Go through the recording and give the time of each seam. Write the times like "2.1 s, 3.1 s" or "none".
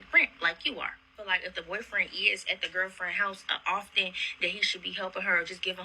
1.1 s